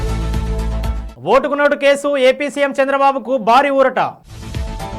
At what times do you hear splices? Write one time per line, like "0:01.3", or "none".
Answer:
0:01.0